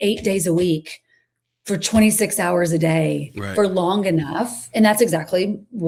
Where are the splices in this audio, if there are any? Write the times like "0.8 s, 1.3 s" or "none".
none